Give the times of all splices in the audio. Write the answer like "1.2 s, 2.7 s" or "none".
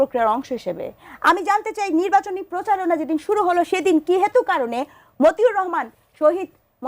none